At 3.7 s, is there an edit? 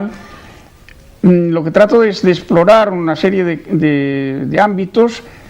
no; 1 cut; at 2.4 s

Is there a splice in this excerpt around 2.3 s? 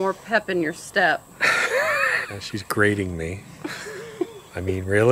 yes; 1 cut; at 2.3 s

